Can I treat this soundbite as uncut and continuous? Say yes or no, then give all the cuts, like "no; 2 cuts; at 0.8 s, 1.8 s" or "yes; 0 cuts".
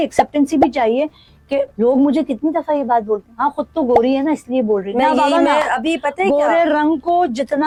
yes; 0 cuts